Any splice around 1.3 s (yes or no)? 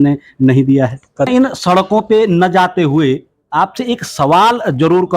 yes